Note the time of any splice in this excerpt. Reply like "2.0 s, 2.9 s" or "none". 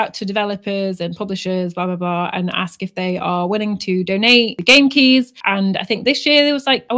none